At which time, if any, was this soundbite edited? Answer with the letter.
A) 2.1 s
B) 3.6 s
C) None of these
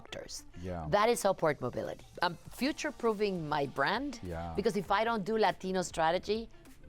A